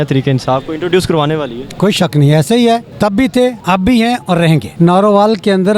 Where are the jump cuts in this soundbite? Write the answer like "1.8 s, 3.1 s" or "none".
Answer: 3.5 s, 4.7 s